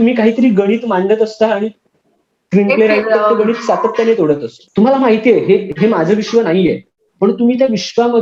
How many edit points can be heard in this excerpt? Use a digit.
1